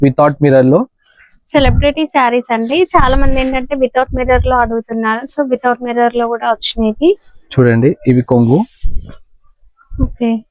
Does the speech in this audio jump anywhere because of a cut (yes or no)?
no